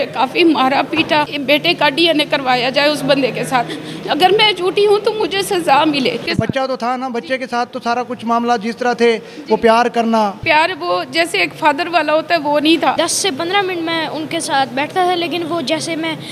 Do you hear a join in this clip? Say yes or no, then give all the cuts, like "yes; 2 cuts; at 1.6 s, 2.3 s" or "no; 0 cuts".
yes; 4 cuts; at 1.3 s, 6.2 s, 10.4 s, 12.9 s